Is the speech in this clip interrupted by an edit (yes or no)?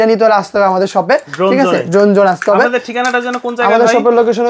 no